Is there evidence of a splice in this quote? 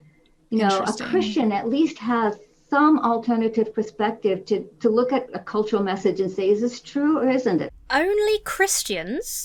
no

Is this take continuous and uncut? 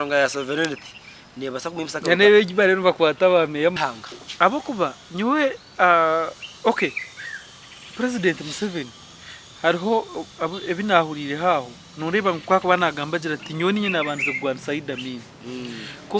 no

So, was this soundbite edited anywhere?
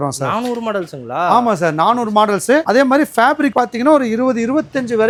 no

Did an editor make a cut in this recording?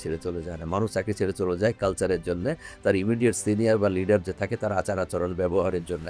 no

